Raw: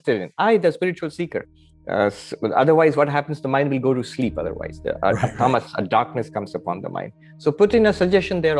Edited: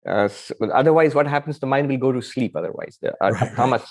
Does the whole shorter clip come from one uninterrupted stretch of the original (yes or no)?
yes